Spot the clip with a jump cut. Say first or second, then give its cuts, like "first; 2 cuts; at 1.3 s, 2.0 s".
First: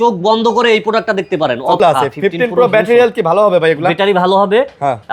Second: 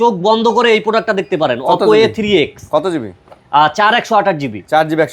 first; 1 cut; at 1.8 s